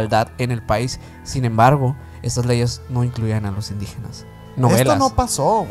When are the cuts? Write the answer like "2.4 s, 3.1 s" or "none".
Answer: 4.4 s